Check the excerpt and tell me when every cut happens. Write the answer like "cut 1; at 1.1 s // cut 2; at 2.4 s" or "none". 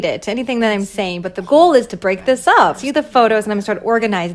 cut 1; at 2.8 s